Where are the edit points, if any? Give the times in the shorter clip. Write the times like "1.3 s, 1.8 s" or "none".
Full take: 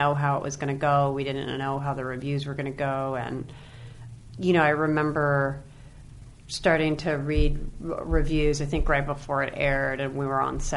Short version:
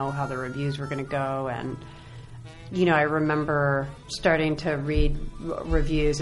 4.0 s